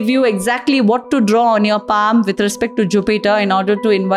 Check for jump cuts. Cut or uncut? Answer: uncut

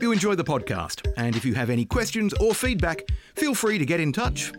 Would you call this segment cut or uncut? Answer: uncut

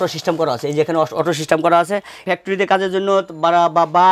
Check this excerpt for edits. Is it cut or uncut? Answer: cut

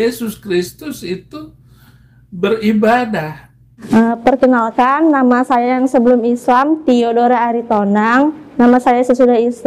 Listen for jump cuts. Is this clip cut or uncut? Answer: cut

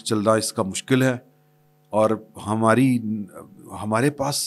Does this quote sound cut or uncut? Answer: uncut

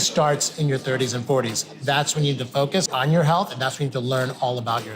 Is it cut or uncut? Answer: cut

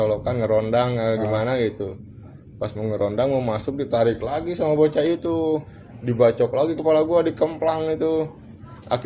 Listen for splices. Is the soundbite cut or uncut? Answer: cut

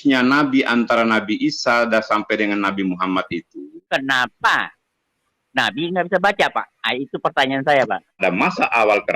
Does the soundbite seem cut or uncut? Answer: cut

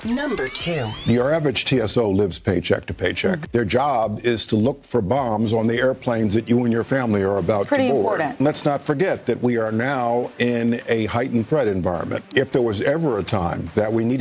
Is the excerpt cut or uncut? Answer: cut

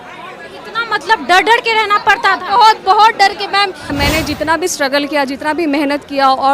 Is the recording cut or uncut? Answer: cut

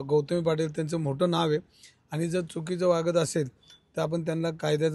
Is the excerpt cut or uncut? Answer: uncut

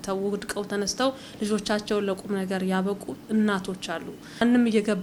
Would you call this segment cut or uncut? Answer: uncut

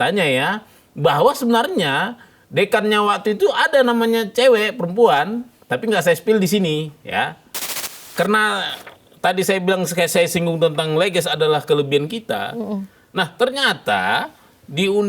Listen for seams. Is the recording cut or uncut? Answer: cut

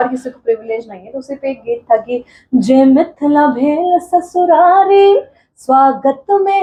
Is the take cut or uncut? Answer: uncut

